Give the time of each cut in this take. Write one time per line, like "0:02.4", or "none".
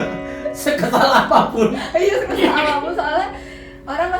none